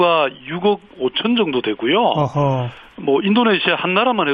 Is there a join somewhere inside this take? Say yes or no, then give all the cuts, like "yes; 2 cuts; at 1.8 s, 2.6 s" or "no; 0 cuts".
yes; 1 cut; at 3.4 s